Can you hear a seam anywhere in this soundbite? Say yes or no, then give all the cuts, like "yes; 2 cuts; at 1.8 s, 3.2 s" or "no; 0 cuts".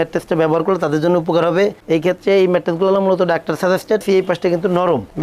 yes; 1 cut; at 4.0 s